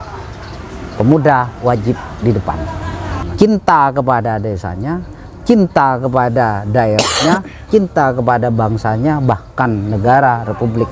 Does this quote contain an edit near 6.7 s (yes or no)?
no